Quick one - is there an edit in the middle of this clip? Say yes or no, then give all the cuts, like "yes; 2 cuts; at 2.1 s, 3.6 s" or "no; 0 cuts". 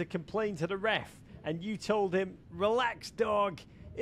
yes; 1 cut; at 2.4 s